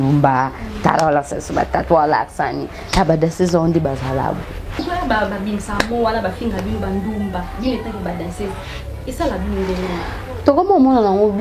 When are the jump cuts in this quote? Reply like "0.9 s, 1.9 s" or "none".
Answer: 4.7 s